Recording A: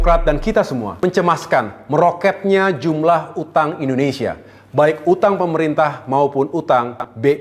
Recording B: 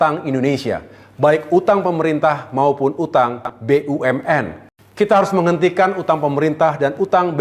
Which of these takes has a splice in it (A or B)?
B